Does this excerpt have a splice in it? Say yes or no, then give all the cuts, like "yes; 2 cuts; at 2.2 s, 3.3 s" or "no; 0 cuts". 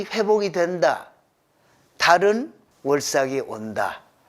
yes; 1 cut; at 2.6 s